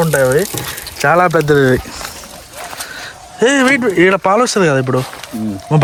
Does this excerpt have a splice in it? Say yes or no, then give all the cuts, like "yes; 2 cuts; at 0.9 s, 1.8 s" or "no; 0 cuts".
no; 0 cuts